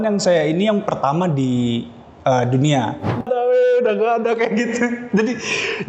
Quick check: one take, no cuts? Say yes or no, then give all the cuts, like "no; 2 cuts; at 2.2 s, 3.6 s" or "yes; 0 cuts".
no; 1 cut; at 3.2 s